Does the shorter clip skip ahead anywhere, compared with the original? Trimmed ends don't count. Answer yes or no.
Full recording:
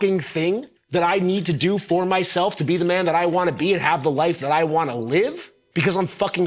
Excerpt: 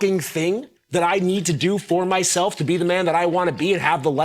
no